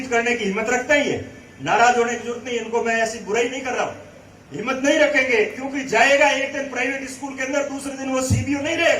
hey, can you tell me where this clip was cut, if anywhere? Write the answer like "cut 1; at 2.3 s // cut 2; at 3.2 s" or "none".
none